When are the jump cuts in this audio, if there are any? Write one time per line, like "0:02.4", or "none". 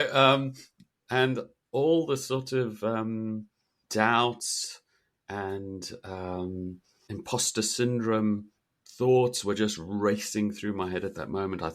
0:07.1